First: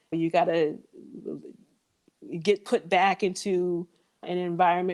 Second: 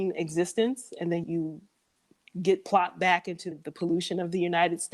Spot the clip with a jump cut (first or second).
second